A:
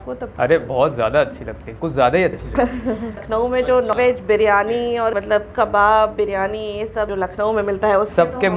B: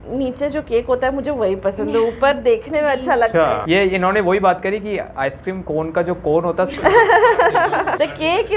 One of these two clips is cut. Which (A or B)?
A